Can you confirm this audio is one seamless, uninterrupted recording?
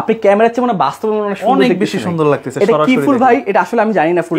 yes; 0 cuts

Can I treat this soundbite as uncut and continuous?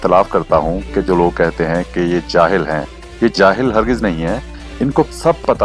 yes; 0 cuts

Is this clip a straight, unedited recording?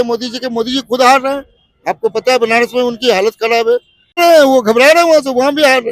no; 1 cut; at 4.2 s

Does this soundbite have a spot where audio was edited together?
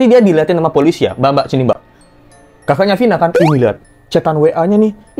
no; 0 cuts

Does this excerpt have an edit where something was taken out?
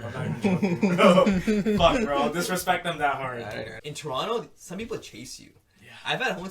yes; 1 cut; at 3.7 s

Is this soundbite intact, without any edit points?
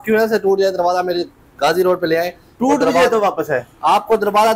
yes; 0 cuts

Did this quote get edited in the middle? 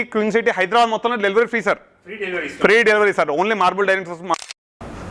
no; 0 cuts

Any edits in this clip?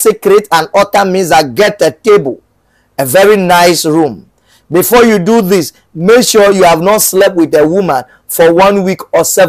no; 0 cuts

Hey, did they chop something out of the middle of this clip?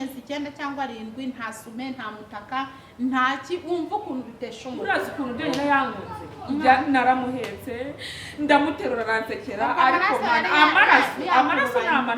yes; 1 cut; at 4.8 s

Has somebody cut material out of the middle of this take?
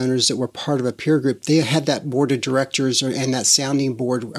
no; 0 cuts

